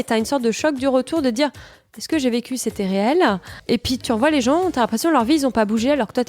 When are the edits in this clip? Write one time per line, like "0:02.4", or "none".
0:04.0